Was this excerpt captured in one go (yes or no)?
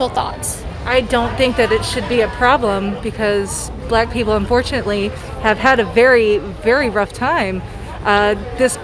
yes